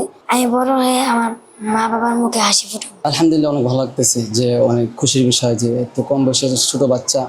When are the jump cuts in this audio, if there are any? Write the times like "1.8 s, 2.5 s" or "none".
2.9 s